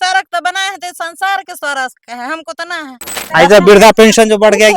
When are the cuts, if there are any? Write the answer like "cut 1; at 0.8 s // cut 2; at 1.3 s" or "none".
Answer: cut 1; at 3.1 s